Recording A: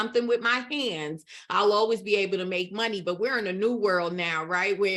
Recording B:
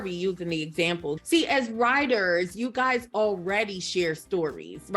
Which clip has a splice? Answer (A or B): B